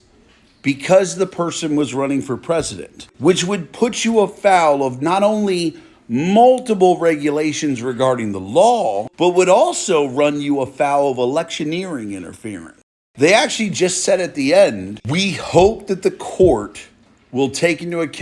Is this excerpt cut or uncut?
cut